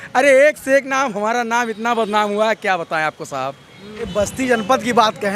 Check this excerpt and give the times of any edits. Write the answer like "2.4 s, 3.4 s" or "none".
3.9 s